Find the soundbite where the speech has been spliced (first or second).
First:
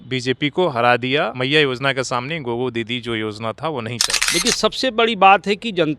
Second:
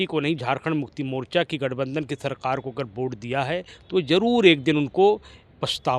first